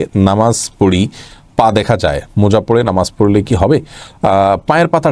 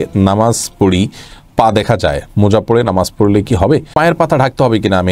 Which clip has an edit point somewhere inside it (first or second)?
second